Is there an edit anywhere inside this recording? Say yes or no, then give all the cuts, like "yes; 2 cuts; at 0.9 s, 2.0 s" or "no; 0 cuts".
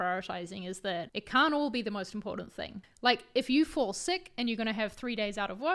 yes; 2 cuts; at 1.2 s, 2.8 s